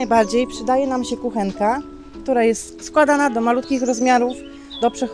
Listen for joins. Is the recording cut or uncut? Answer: uncut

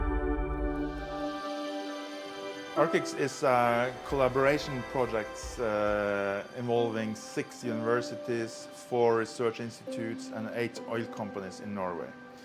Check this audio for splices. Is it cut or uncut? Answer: cut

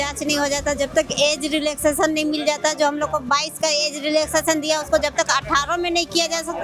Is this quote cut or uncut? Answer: uncut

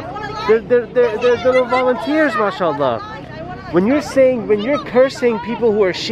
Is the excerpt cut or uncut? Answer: uncut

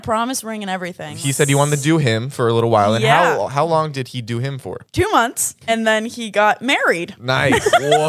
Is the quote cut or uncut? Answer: cut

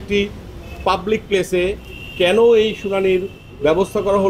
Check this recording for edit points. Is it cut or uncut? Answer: uncut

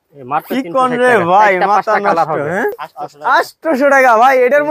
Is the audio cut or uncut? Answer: cut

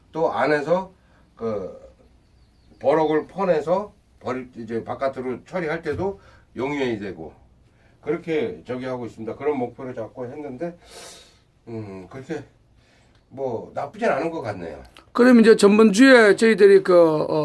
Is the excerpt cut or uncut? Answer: cut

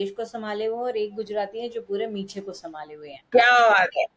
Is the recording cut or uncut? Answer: uncut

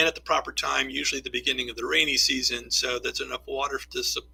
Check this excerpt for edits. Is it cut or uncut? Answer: uncut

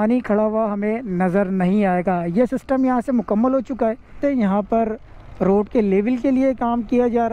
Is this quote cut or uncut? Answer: cut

